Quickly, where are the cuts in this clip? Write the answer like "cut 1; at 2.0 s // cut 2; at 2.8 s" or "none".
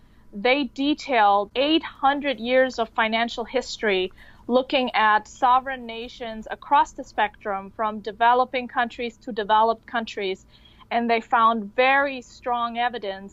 none